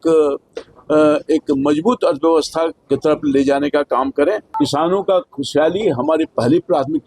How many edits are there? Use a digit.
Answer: 1